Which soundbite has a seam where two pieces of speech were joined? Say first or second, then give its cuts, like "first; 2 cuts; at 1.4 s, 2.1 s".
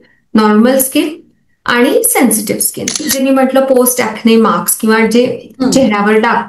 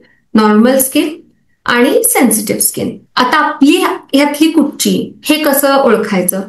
first; 1 cut; at 3.1 s